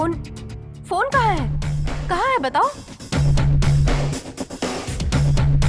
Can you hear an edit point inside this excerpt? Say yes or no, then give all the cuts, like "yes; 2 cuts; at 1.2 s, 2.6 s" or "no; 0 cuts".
no; 0 cuts